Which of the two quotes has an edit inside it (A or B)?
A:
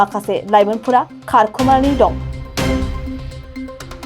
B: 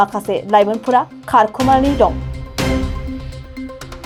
A